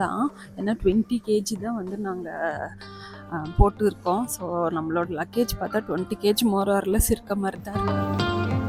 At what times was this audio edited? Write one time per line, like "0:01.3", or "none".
0:07.8